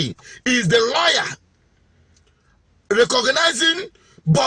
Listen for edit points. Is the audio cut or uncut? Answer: uncut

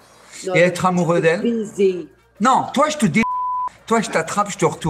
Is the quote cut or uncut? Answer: uncut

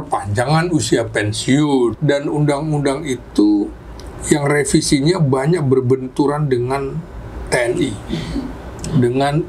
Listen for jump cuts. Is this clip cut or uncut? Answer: cut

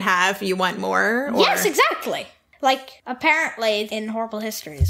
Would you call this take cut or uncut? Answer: cut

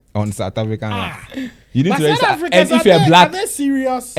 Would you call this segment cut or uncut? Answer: uncut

